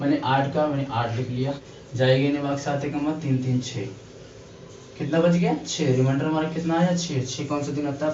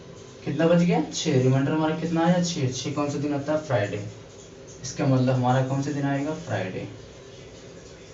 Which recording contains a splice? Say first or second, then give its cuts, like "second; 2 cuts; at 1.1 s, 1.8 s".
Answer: first; 1 cut; at 1.6 s